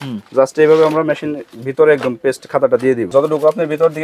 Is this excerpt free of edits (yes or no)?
no